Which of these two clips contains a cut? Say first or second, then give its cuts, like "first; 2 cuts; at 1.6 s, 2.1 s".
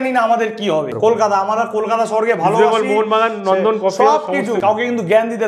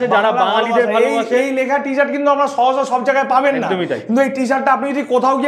first; 2 cuts; at 0.9 s, 4.6 s